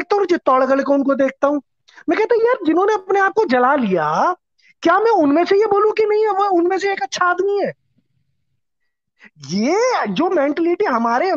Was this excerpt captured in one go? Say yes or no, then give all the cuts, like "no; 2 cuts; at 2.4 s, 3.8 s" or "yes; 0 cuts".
yes; 0 cuts